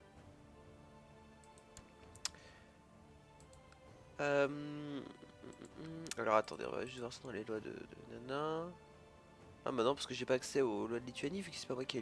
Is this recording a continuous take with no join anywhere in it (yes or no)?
no